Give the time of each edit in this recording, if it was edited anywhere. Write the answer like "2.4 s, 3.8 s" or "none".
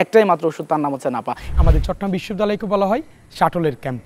1.5 s